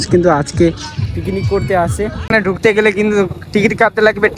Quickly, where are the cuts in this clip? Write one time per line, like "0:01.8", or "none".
0:02.1